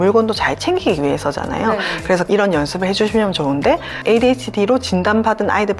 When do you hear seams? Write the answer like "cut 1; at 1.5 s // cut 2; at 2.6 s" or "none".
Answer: cut 1; at 2.3 s // cut 2; at 4.0 s